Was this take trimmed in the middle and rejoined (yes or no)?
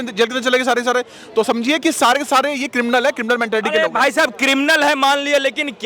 no